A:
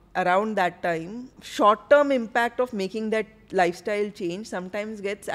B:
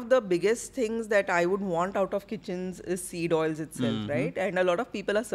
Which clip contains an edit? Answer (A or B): A